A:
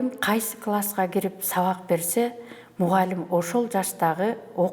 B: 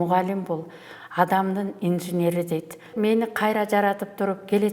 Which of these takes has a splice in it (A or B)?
B